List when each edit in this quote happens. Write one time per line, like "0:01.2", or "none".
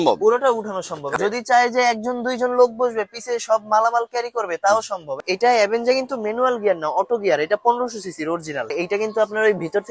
0:01.1
0:05.2
0:08.7